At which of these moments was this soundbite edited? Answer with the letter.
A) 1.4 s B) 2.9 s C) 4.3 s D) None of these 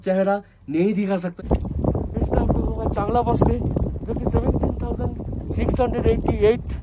A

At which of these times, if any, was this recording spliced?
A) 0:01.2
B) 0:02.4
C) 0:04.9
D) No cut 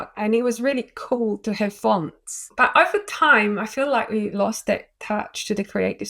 B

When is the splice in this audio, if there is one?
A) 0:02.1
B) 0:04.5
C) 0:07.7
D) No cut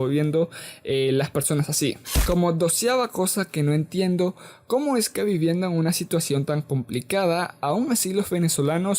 A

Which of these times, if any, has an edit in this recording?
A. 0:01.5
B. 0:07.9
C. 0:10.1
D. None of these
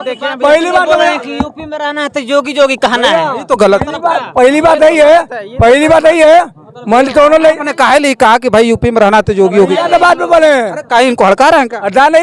D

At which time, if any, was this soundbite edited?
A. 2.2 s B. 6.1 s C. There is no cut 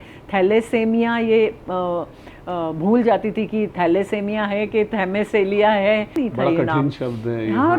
B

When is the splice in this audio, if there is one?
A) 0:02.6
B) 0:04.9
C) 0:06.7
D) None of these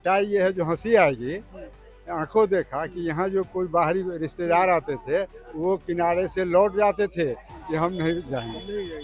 D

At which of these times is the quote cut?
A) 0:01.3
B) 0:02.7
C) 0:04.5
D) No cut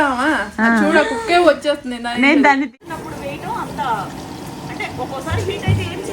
B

